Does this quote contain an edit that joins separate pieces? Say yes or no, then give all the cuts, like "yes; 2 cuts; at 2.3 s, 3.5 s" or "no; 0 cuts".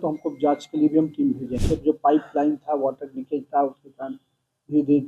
yes; 1 cut; at 1.6 s